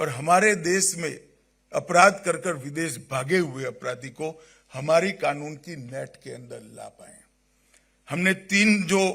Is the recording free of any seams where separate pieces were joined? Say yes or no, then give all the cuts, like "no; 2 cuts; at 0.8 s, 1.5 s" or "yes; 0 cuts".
yes; 0 cuts